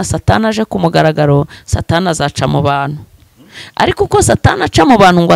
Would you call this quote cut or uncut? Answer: uncut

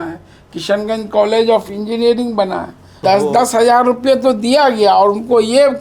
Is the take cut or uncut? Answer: cut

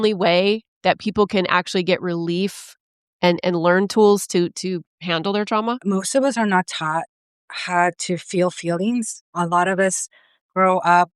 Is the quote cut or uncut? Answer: cut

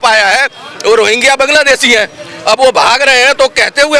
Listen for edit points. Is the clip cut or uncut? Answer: uncut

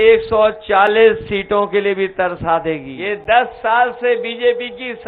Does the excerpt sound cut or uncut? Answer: cut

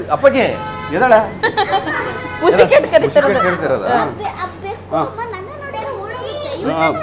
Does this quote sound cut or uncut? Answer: uncut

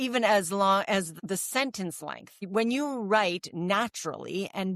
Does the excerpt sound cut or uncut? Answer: cut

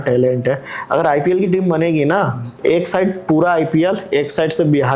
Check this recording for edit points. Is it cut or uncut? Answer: cut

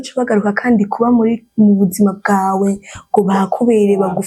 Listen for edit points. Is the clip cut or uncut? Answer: uncut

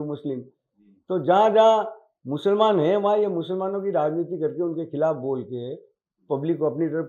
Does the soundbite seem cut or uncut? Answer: uncut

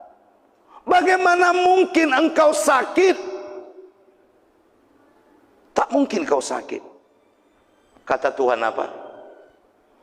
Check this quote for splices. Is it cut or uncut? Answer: uncut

